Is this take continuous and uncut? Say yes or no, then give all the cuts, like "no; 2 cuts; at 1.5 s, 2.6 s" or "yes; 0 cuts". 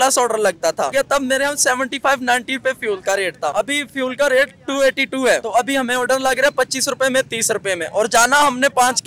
no; 3 cuts; at 0.9 s, 3.5 s, 5.4 s